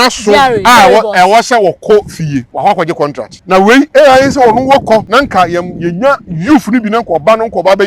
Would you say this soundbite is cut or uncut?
cut